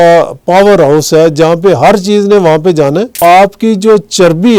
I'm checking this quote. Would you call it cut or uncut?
cut